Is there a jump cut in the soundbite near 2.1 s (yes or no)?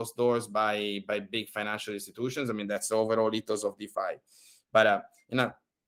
no